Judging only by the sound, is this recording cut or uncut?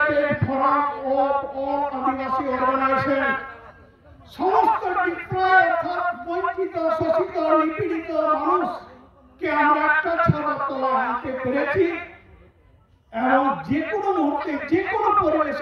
uncut